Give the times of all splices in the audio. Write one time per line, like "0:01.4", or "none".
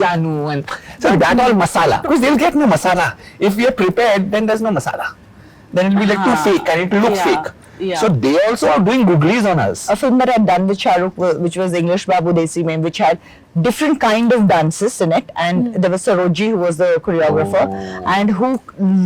0:02.0
0:09.8